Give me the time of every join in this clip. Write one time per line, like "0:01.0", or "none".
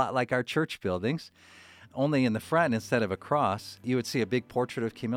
0:01.9
0:03.9